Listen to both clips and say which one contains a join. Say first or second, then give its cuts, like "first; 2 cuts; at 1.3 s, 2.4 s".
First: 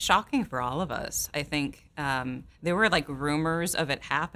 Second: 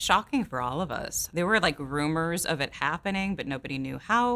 second; 1 cut; at 1.2 s